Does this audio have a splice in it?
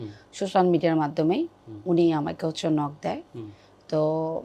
no; 0 cuts

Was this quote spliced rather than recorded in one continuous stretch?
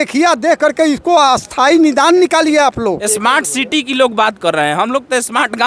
yes; 1 cut; at 3.1 s

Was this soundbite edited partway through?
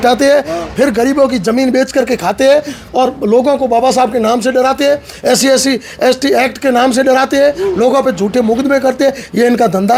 no; 0 cuts

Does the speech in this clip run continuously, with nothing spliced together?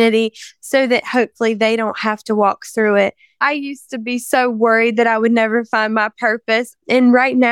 no; 2 cuts; at 3.4 s, 6.7 s

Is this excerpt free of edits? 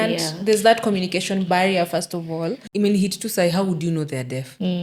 no; 1 cut; at 2.6 s

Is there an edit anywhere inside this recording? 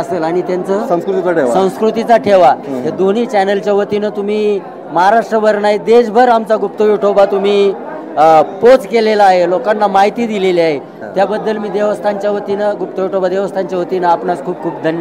no; 0 cuts

